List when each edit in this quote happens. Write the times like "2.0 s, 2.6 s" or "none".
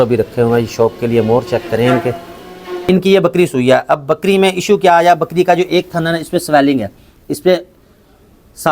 2.8 s